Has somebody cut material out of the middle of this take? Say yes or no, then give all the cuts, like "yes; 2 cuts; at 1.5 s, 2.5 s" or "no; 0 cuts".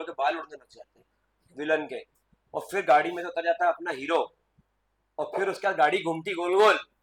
no; 0 cuts